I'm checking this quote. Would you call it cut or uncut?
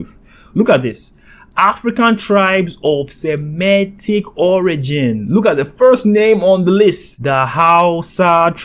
cut